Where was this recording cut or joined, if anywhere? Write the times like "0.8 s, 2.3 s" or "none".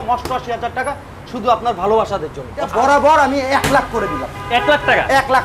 2.6 s